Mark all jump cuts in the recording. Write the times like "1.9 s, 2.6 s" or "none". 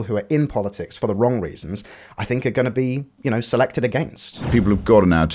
0.9 s, 4.4 s